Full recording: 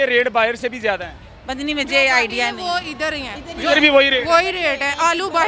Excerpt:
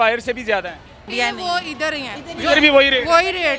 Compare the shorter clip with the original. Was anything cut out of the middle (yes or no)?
yes